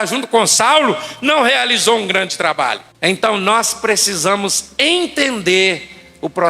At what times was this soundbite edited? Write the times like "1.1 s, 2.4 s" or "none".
2.9 s